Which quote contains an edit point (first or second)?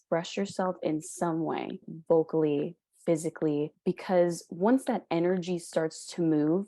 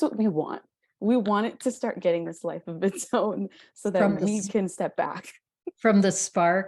first